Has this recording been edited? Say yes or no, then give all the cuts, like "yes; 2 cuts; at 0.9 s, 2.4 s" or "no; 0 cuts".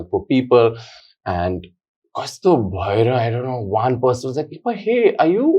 no; 0 cuts